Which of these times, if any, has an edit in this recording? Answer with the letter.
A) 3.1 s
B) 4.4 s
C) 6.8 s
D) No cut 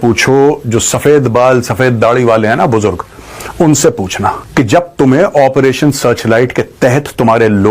B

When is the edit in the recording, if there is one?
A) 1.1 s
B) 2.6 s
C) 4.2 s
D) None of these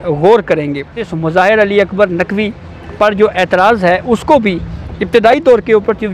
A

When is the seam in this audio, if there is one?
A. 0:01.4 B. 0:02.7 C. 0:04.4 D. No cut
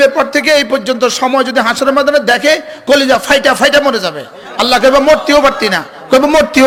D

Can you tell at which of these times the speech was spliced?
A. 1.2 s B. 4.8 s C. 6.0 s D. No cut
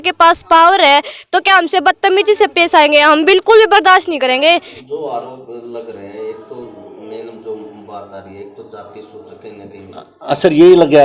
B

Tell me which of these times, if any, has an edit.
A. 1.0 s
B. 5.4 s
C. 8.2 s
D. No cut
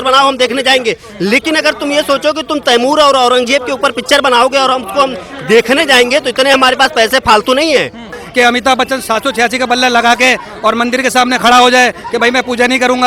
C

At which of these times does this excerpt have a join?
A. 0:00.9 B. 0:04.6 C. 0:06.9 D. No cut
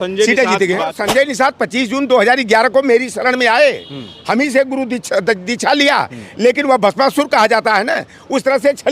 A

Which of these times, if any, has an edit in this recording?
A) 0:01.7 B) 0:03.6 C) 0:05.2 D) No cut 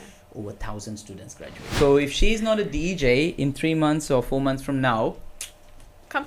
A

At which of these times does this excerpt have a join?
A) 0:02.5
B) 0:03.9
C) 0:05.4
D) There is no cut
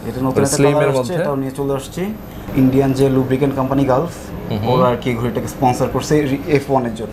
A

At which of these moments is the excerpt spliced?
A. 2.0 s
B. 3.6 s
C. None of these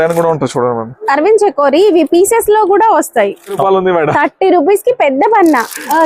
B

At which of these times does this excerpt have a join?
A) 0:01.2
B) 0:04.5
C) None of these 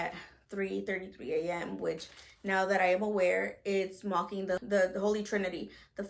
C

